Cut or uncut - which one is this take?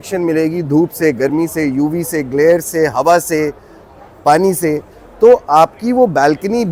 uncut